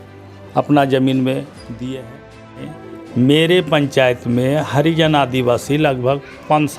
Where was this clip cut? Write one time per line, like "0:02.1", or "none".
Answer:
0:02.6